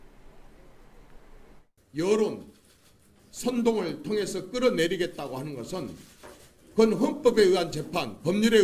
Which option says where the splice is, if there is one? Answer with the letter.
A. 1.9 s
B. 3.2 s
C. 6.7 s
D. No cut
A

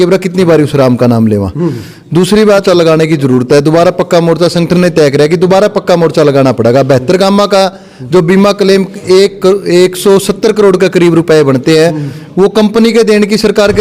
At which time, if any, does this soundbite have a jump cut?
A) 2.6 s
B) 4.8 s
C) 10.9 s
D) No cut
A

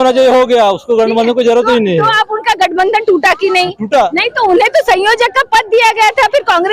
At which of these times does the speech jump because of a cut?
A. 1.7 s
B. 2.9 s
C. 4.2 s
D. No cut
C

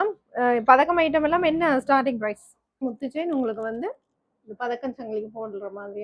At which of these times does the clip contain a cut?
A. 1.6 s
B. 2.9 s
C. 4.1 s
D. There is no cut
B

